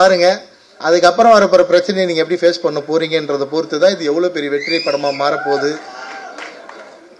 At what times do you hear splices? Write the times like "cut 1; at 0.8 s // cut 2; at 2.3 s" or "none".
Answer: none